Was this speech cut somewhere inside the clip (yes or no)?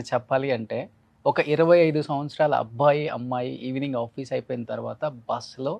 no